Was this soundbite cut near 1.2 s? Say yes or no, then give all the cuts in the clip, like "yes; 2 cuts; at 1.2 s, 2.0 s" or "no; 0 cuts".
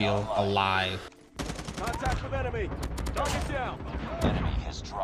yes; 1 cut; at 1.2 s